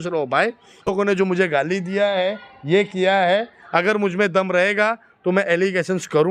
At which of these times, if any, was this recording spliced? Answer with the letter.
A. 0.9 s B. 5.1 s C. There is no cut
A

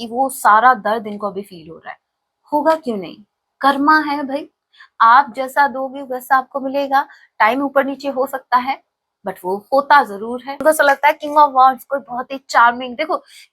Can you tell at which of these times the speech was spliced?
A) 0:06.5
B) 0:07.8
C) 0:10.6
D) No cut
C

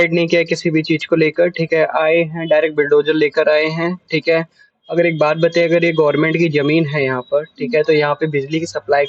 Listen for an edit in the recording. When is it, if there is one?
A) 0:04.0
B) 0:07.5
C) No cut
C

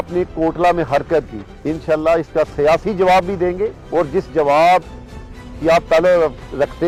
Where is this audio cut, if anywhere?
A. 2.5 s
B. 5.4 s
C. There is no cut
C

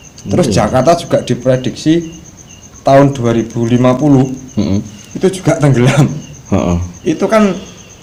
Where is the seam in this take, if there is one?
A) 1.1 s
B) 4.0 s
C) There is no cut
C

